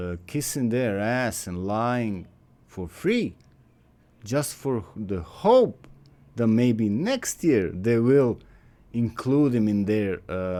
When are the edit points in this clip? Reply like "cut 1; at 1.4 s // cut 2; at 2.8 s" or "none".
none